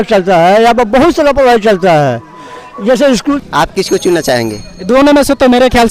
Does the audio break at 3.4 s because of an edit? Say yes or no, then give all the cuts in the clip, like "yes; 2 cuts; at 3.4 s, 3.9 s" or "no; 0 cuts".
yes; 1 cut; at 3.4 s